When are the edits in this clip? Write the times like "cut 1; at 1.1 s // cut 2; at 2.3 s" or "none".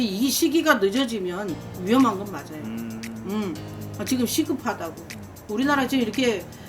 cut 1; at 3.7 s